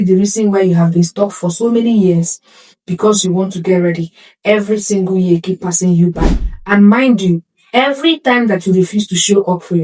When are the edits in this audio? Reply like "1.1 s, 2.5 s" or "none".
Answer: none